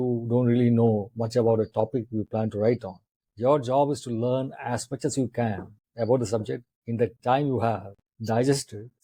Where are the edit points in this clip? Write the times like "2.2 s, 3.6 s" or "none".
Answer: none